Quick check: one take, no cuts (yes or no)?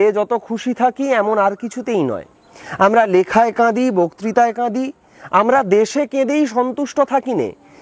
yes